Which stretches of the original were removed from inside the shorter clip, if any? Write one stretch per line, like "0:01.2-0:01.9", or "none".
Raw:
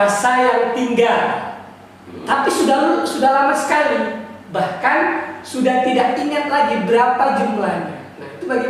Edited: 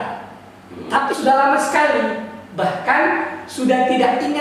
0:02.5-0:03.1